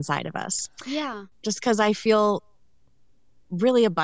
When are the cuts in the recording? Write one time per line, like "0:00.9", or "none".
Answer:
0:01.2